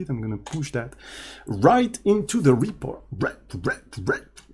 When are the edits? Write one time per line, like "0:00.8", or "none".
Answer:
none